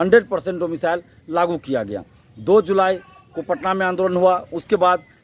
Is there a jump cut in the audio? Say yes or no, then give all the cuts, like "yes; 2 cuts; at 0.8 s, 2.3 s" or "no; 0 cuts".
no; 0 cuts